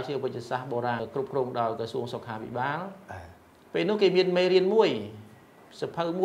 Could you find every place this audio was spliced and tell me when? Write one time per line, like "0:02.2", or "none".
0:01.0